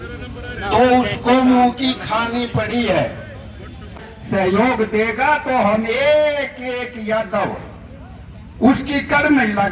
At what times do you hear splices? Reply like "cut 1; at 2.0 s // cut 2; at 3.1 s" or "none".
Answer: cut 1; at 4.1 s